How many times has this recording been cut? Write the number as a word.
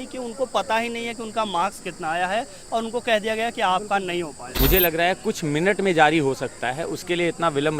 one